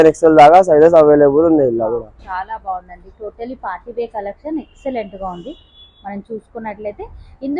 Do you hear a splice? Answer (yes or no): no